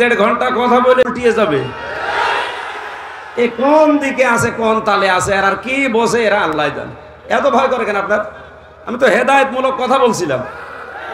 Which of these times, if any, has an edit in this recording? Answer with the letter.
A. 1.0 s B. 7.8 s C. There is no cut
A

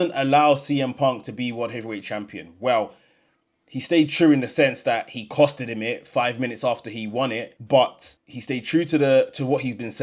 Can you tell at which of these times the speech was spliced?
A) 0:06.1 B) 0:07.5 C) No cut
B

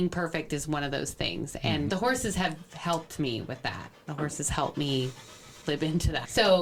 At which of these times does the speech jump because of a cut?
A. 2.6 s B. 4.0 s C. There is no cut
C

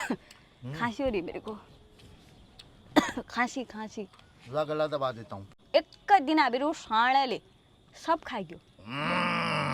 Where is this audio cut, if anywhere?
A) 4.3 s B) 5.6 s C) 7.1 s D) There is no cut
B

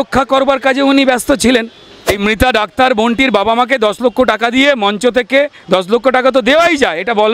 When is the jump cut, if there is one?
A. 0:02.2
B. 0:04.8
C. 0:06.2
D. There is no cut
A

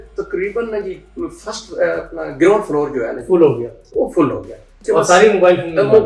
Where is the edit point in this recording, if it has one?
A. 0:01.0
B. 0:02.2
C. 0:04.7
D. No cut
C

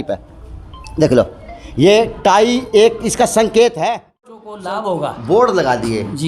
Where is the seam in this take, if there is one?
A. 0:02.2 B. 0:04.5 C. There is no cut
B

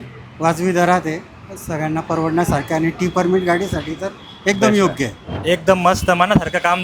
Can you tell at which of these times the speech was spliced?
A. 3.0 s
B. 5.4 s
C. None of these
B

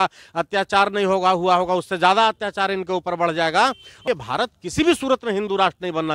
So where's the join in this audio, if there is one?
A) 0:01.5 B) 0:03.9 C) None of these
B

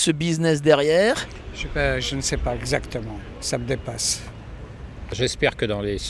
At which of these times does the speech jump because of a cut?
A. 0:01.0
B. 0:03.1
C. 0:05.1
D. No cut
C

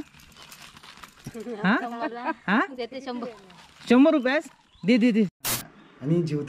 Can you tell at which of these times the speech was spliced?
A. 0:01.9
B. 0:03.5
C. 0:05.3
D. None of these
C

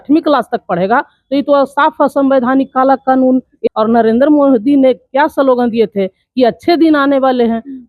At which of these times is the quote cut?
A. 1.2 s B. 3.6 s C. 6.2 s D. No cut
B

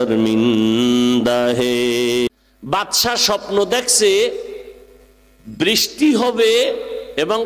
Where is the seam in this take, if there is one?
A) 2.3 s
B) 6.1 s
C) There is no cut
A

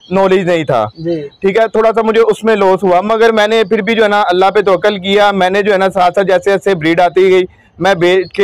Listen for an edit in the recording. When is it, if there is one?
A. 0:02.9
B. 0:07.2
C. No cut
C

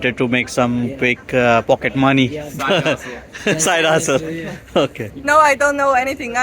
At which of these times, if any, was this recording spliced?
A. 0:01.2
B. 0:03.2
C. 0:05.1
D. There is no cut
C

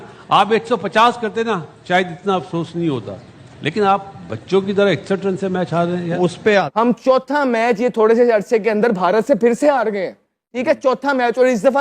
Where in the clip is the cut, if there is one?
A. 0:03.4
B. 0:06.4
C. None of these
B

